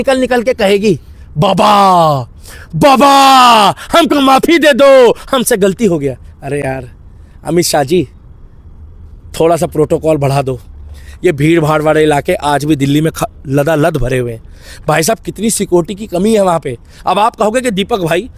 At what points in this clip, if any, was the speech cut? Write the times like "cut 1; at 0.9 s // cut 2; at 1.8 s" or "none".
none